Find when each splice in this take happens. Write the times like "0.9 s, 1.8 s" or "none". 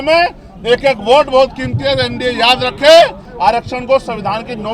3.2 s